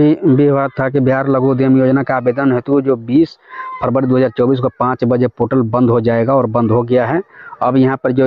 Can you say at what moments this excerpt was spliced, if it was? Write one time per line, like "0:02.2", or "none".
none